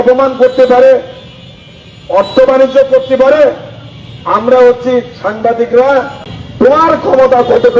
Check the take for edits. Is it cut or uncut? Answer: cut